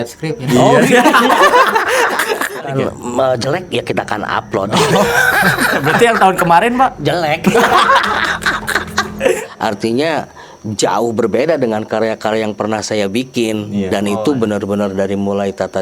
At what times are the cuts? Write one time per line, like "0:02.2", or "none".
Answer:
0:02.7
0:09.4